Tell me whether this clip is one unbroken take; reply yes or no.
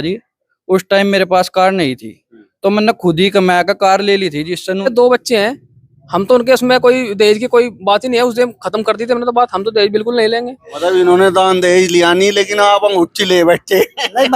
no